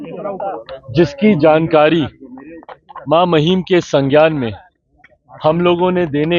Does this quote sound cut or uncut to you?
uncut